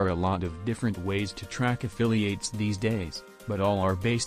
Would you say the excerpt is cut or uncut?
uncut